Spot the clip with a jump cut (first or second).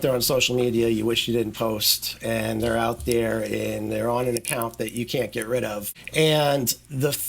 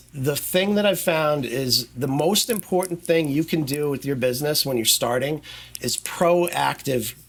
first